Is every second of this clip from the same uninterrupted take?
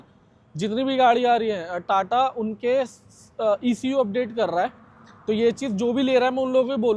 yes; 0 cuts

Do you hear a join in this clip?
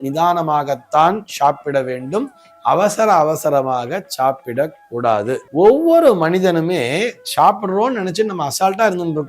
yes; 1 cut; at 5.4 s

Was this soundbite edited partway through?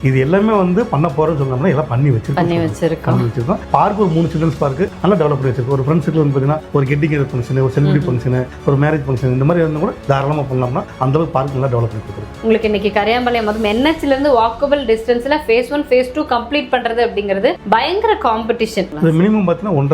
yes; 2 cuts; at 12.3 s, 18.9 s

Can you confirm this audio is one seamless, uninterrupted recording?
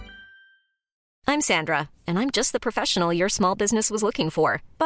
no; 1 cut; at 1.1 s

